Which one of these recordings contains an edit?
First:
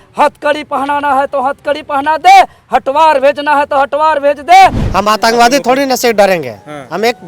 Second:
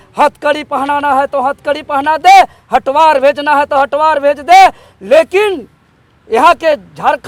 first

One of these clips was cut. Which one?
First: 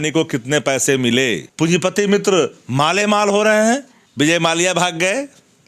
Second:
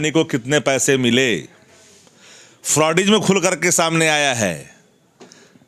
first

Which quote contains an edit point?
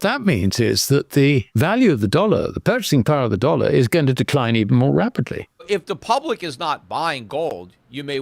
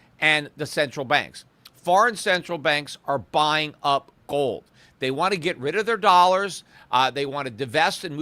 first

